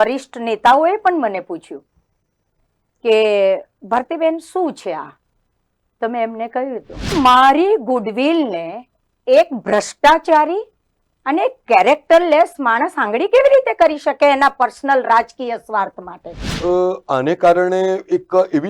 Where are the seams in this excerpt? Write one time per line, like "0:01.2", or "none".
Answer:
0:07.1
0:16.5